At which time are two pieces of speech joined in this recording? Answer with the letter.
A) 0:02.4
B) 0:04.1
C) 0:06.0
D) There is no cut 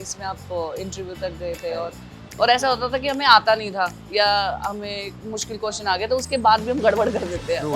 A